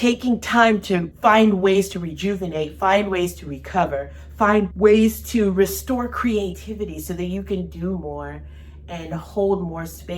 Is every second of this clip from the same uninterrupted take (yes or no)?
no